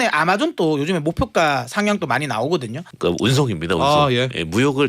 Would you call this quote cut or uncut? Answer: cut